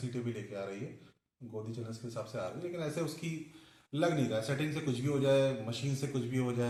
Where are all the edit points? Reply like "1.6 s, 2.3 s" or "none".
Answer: none